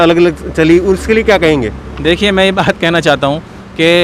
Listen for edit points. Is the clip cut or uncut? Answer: uncut